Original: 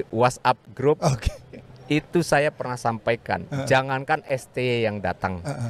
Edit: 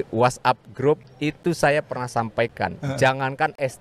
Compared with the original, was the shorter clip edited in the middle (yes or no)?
yes